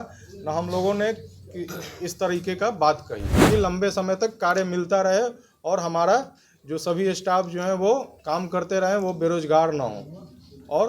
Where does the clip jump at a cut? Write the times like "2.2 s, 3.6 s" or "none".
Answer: 3.3 s